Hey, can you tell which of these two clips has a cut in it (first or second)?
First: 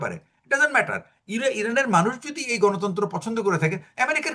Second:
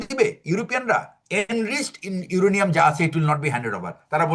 second